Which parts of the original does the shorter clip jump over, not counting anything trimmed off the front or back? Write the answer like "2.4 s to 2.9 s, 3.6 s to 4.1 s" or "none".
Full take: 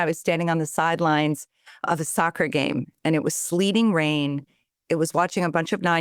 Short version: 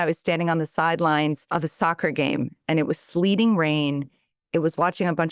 1.4 s to 1.8 s